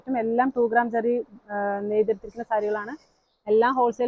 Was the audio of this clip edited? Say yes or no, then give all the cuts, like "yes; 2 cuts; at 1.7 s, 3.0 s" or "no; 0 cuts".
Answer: no; 0 cuts